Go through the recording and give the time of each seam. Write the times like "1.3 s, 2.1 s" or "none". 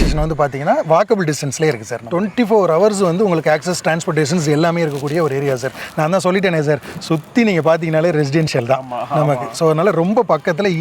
2.0 s